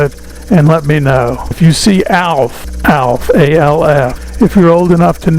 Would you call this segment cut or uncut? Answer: cut